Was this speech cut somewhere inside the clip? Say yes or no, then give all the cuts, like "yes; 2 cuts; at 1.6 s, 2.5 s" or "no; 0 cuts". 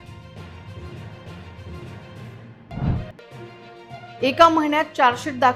no; 0 cuts